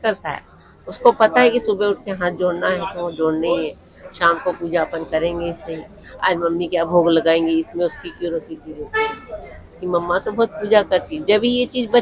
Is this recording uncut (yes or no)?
yes